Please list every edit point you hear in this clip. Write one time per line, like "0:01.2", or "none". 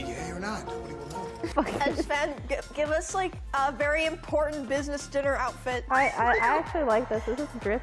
0:01.5
0:05.8